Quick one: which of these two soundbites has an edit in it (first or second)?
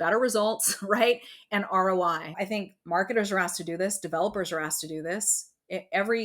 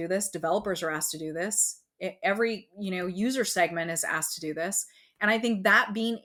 first